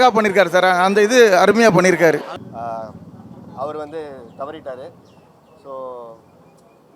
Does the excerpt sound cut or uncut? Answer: cut